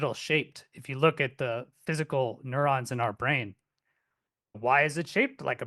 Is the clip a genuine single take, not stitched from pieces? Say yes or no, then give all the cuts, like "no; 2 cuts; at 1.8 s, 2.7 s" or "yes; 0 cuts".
no; 1 cut; at 4.6 s